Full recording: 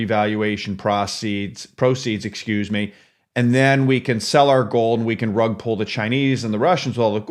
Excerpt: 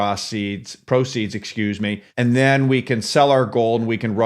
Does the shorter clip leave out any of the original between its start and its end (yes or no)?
yes